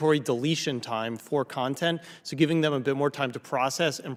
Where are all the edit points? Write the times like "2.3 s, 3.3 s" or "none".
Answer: none